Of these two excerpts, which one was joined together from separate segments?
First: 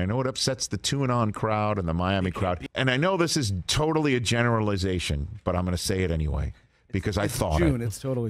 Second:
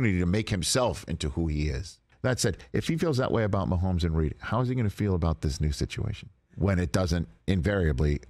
first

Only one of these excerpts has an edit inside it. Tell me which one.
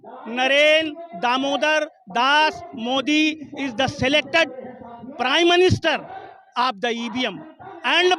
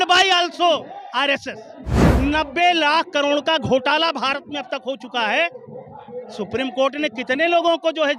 second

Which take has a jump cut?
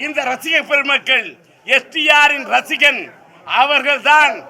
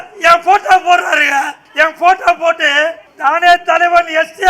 second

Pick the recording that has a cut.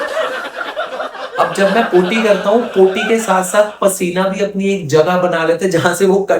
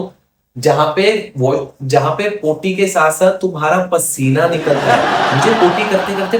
first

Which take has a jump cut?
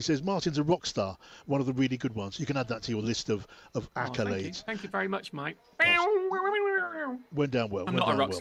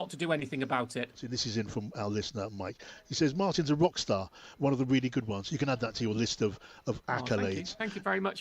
second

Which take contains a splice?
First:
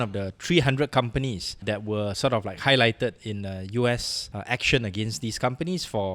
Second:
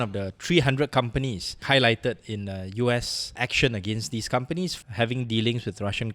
second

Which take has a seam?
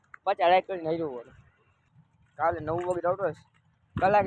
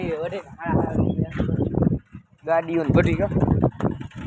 first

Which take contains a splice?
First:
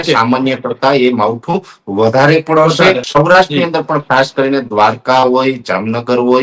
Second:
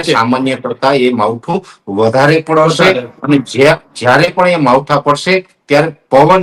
first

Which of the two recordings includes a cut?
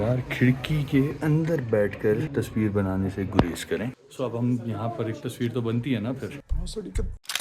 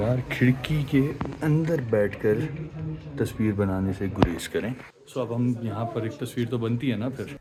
first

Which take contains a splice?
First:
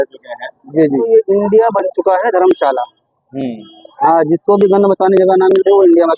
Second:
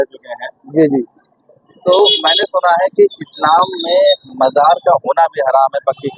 first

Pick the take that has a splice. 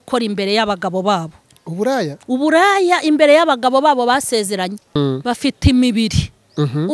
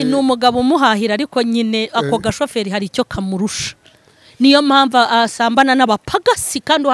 first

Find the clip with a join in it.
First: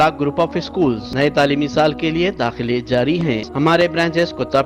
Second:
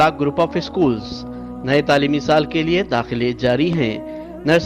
first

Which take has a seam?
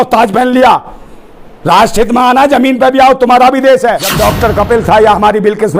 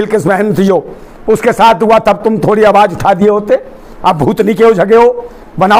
first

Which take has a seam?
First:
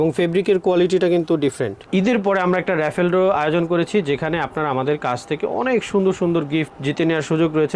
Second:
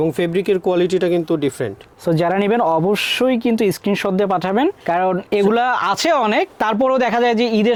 first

